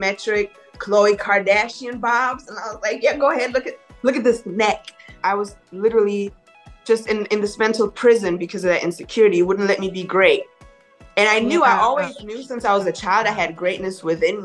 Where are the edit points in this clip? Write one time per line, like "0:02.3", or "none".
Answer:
0:05.0